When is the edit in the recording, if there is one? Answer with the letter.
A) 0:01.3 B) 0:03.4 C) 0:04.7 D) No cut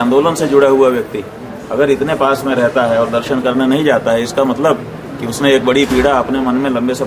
D